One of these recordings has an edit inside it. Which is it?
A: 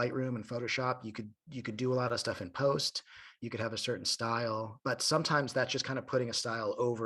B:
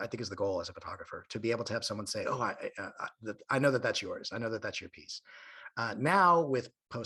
A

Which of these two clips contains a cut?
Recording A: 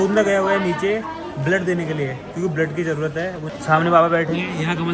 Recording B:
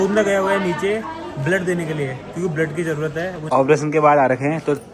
B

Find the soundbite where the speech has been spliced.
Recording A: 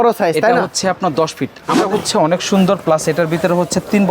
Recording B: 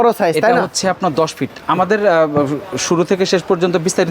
A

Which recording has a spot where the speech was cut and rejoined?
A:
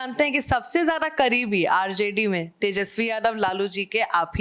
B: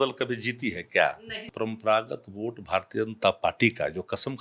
B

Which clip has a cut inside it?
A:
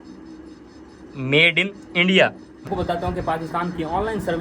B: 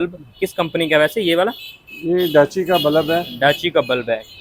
A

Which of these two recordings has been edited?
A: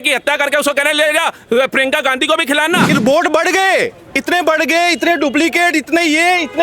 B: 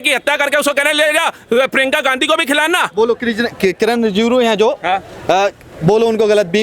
A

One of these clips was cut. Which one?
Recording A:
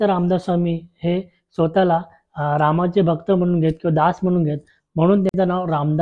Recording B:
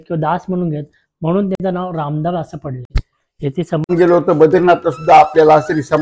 B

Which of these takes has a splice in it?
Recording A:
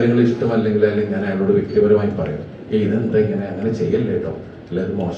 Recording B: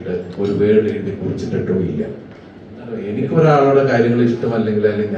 B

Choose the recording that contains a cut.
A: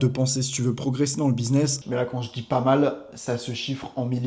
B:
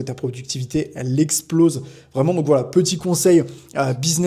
A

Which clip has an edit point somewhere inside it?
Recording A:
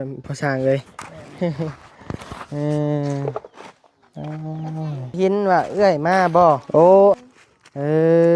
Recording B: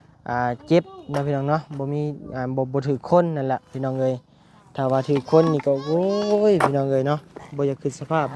A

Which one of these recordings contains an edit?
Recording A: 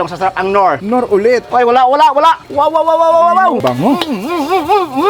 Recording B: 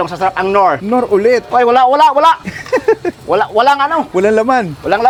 A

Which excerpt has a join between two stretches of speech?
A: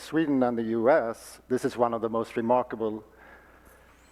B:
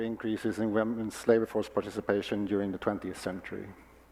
A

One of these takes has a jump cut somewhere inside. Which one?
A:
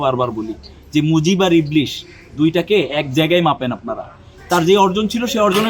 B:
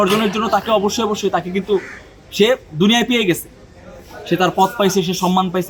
A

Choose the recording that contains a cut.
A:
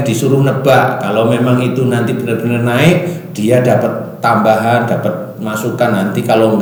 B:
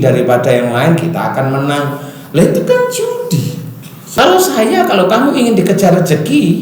B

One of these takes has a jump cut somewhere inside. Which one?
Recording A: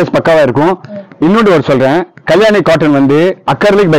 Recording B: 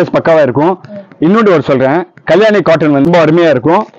B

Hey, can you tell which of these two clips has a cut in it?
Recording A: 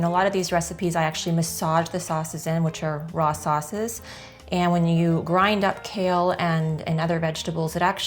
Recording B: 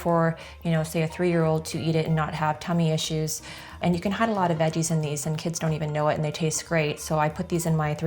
B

